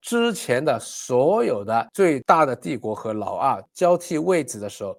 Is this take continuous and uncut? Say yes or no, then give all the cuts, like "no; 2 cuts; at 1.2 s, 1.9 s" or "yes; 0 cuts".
yes; 0 cuts